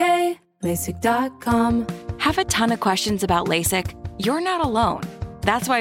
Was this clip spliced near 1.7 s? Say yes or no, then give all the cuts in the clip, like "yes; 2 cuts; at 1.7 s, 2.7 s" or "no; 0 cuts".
yes; 1 cut; at 1.7 s